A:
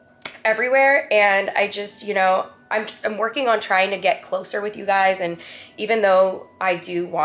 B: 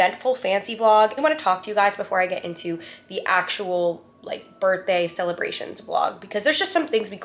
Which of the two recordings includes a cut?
B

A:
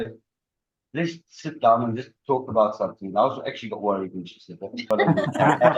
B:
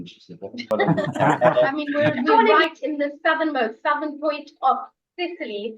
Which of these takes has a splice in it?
B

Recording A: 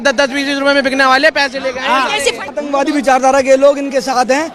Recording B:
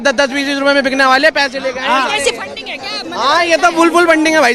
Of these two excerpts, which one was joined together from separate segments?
A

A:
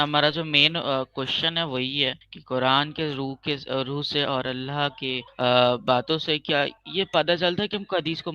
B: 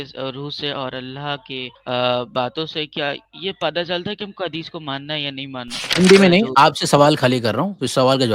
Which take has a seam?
B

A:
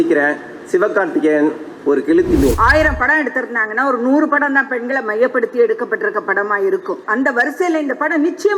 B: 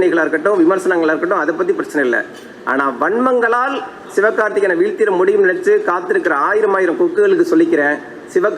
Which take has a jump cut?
A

